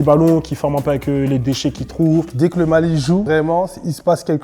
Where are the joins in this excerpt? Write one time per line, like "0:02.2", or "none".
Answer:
0:02.3
0:03.3

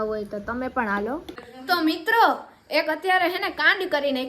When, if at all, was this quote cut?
0:01.5

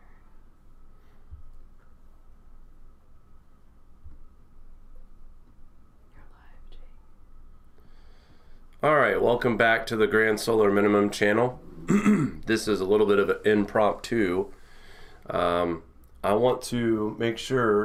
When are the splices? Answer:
none

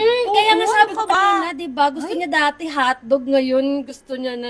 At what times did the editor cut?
0:01.1

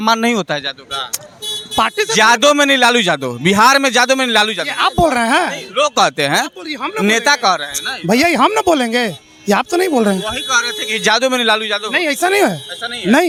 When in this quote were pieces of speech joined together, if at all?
none

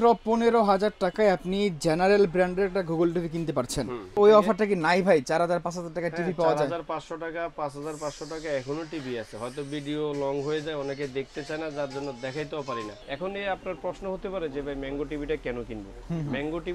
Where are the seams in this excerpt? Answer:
0:04.2
0:12.9

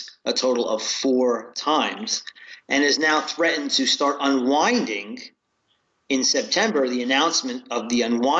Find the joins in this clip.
none

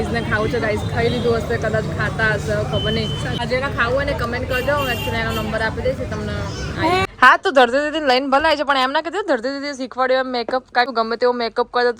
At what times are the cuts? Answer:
0:03.4
0:07.0
0:10.9

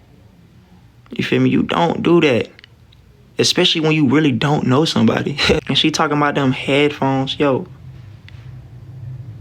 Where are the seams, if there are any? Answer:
0:05.6

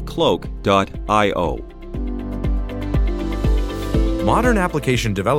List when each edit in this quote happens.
0:01.8
0:04.2

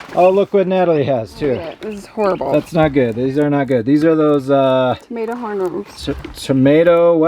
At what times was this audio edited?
none

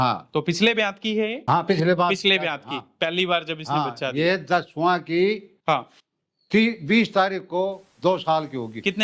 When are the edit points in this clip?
0:01.4

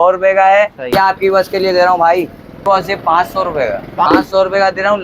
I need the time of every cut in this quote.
0:00.9
0:02.7
0:04.1

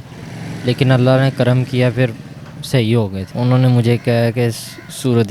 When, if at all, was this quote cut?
0:03.2

